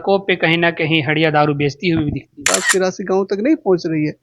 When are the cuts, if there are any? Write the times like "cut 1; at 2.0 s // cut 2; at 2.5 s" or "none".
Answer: cut 1; at 2.4 s